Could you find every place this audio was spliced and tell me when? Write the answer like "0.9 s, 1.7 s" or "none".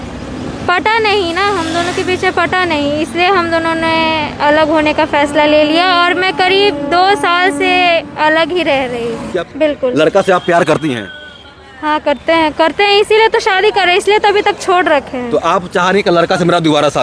9.4 s